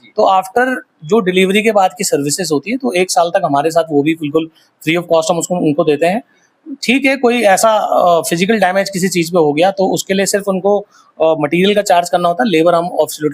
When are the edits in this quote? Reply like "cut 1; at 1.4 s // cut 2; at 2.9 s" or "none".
none